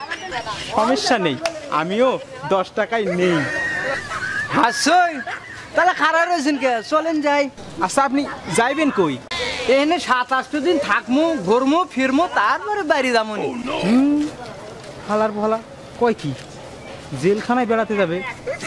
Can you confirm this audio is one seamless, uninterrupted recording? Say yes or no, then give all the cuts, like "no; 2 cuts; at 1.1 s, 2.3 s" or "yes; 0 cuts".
no; 2 cuts; at 9.3 s, 12.4 s